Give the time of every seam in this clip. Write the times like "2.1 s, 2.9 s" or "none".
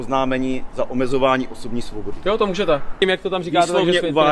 3.0 s